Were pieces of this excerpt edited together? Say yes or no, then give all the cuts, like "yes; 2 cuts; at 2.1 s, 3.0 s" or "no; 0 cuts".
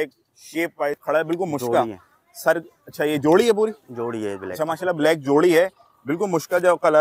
yes; 1 cut; at 1.0 s